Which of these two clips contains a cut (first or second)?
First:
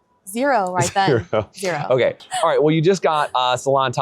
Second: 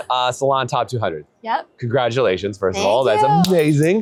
first